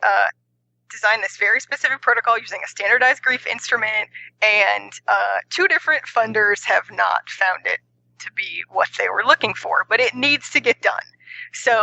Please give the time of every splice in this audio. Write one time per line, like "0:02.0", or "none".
none